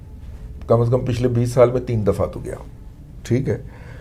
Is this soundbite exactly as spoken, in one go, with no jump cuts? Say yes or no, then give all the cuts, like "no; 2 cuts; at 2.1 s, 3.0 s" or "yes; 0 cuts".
yes; 0 cuts